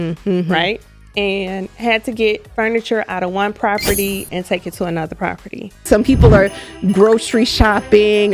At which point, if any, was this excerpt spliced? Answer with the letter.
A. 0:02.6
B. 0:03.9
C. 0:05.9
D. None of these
C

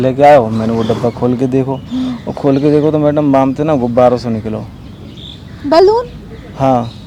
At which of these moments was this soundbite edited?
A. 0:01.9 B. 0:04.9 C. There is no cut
C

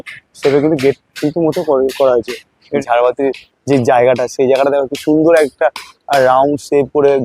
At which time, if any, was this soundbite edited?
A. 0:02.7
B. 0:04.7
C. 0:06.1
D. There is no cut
A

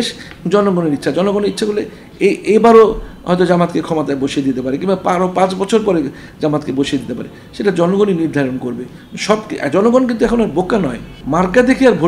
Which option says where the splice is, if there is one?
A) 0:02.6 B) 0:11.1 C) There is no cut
B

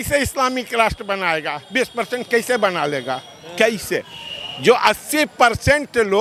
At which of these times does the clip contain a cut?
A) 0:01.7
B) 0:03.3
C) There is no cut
C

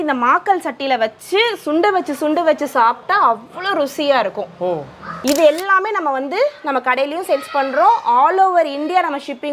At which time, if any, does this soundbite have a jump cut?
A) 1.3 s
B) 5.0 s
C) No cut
B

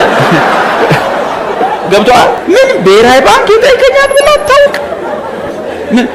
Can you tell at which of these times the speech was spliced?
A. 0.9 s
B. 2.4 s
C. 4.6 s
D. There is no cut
B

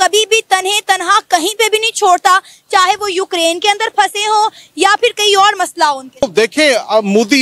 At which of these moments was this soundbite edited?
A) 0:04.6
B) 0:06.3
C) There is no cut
B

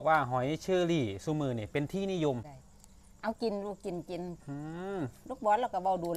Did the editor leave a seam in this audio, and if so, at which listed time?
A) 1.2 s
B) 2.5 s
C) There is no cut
B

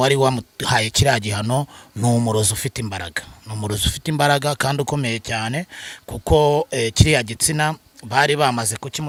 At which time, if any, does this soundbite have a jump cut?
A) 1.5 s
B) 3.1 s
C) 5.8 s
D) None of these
D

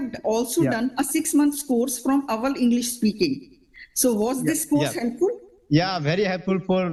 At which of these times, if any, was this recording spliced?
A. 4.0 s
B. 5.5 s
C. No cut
C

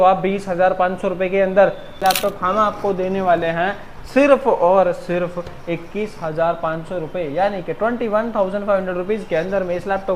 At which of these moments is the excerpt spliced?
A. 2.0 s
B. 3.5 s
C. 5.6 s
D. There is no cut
A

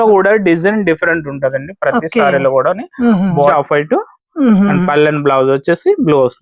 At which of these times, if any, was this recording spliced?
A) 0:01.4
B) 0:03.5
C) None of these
B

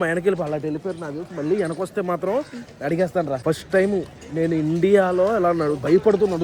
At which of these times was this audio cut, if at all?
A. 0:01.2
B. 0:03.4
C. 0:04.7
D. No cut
B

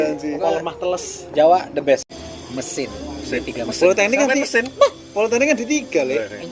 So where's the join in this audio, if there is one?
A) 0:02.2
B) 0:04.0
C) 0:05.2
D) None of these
A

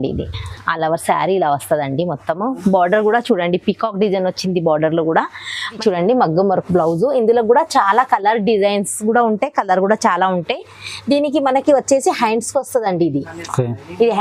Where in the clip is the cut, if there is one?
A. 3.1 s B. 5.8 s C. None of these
B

